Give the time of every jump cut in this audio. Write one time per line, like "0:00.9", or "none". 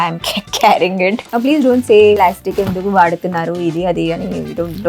0:01.2
0:02.2